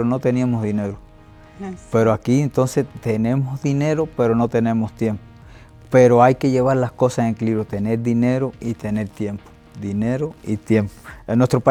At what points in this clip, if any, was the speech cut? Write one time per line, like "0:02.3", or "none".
none